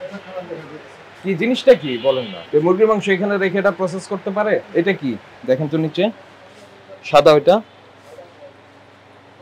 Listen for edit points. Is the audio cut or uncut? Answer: cut